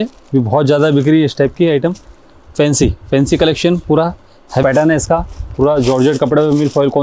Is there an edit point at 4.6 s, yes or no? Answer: yes